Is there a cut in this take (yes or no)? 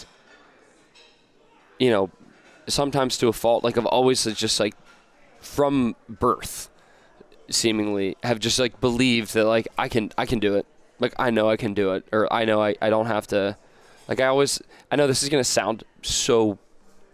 no